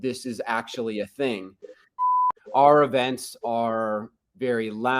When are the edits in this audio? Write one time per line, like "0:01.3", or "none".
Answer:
0:02.1